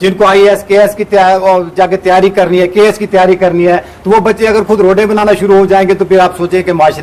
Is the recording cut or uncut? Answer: uncut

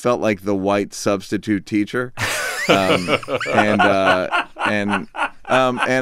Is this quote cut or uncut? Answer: uncut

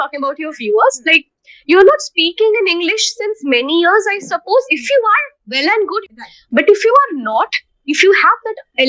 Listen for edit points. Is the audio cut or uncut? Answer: cut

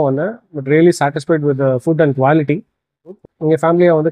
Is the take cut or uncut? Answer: cut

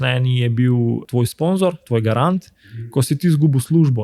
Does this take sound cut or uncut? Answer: cut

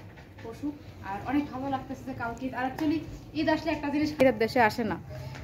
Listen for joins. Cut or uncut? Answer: cut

